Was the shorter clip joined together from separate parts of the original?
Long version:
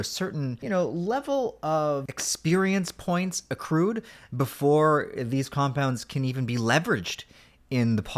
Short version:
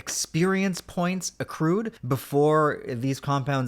yes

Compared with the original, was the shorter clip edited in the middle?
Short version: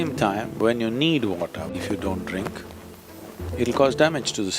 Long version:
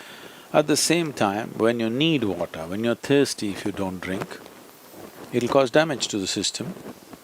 yes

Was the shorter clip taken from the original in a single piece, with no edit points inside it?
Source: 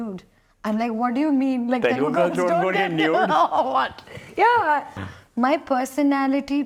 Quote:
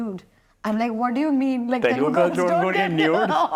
yes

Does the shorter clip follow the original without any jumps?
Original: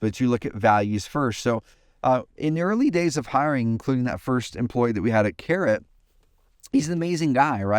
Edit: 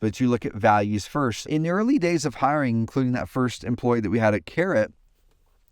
no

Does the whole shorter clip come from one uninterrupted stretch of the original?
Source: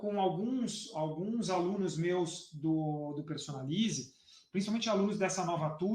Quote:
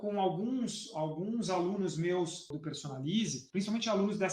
no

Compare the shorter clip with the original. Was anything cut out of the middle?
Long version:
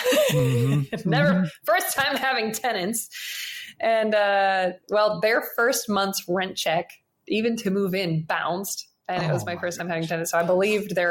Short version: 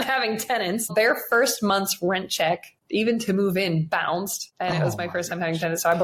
yes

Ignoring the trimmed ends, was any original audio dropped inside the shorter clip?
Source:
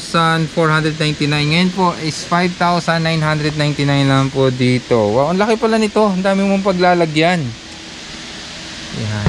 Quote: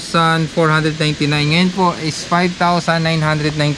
no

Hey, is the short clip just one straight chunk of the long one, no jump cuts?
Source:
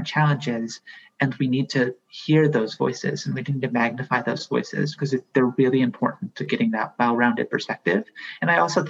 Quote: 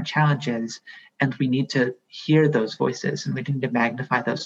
yes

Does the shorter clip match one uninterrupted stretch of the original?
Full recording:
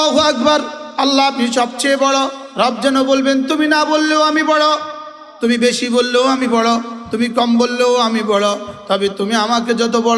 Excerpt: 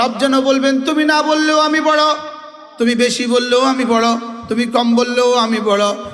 yes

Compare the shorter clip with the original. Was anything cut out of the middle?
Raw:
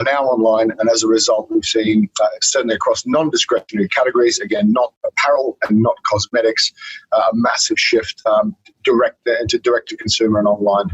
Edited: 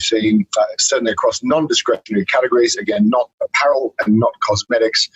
no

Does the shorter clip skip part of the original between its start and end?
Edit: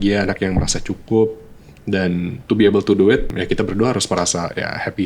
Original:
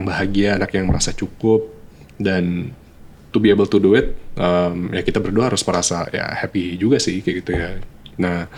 yes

